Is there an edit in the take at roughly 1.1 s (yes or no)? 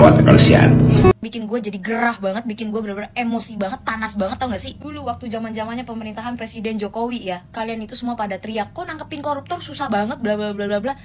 yes